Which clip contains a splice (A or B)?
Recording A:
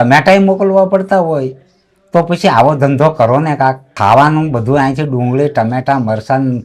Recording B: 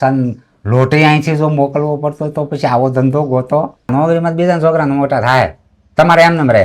B